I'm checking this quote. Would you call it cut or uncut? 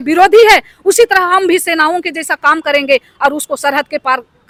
uncut